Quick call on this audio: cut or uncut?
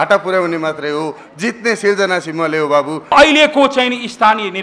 cut